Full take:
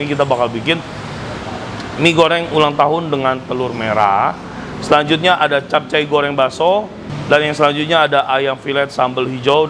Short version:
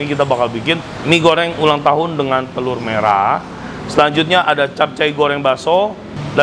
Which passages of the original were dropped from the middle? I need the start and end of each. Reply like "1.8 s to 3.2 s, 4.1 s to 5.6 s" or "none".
0.9 s to 1.8 s